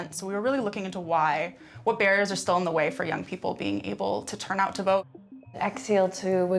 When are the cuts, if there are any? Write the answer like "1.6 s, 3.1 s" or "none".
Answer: 5.6 s